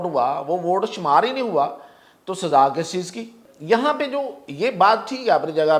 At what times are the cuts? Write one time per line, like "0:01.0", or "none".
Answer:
0:03.5